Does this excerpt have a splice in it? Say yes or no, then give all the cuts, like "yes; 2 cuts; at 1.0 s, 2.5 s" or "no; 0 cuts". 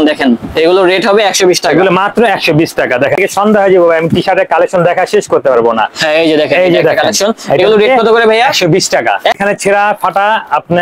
yes; 2 cuts; at 3.2 s, 9.4 s